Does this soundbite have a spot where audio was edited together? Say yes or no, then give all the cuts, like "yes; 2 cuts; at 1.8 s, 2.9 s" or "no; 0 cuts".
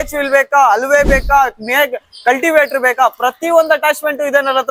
no; 0 cuts